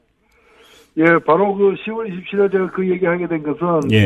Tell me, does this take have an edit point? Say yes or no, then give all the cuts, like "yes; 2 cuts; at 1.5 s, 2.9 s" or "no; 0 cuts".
no; 0 cuts